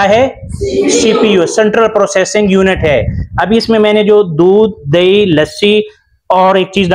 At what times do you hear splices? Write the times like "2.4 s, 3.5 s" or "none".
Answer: none